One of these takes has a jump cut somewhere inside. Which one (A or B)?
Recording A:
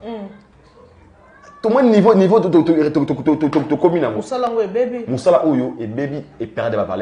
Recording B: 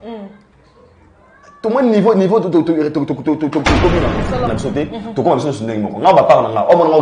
B